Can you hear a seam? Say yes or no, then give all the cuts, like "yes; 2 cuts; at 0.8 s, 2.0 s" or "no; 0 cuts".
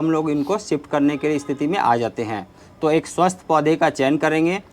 no; 0 cuts